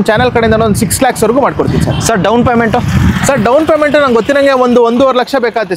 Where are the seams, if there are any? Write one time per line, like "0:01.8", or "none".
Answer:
none